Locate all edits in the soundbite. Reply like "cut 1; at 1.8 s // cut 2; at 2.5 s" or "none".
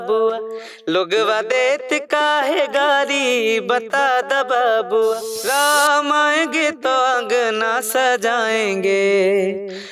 cut 1; at 5.3 s